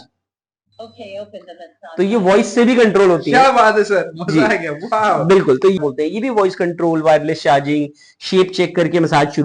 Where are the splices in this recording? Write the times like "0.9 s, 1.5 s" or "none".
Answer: 5.8 s